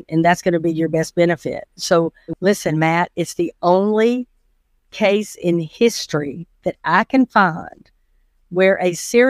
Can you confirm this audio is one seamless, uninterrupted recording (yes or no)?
no